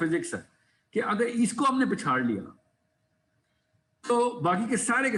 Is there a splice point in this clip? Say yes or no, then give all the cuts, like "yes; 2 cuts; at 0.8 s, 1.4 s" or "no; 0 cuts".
no; 0 cuts